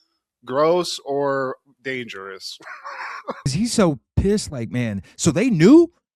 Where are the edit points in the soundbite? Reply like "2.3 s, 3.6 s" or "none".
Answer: 3.5 s